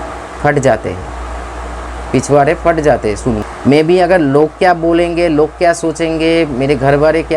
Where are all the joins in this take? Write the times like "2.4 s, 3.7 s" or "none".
3.5 s